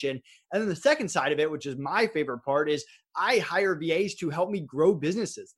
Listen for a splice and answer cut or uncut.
uncut